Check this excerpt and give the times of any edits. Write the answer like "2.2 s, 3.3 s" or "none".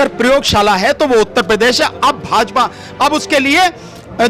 none